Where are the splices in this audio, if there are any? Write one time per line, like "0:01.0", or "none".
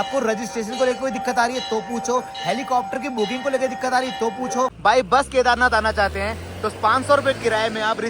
0:04.7